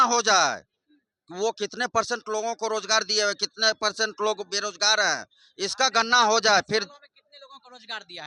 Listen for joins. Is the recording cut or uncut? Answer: uncut